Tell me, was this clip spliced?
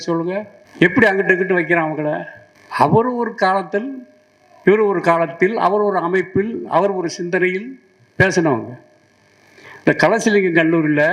no; 0 cuts

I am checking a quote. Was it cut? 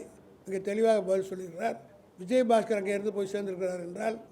no; 0 cuts

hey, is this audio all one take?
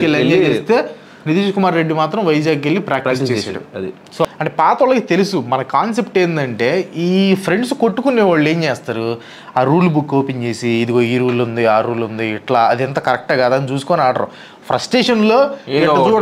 no; 1 cut; at 4.2 s

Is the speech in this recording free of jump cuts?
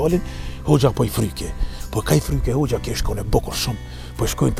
yes; 0 cuts

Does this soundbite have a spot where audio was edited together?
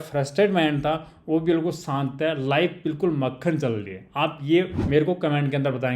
yes; 1 cut; at 4.8 s

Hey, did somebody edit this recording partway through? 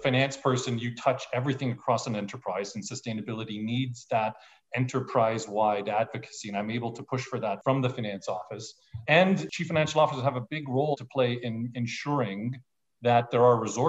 yes; 3 cuts; at 7.6 s, 9.5 s, 10.9 s

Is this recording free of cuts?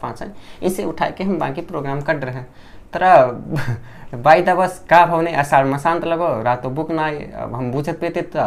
yes; 0 cuts

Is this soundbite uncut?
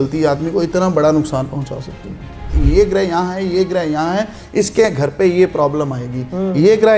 no; 1 cut; at 2.6 s

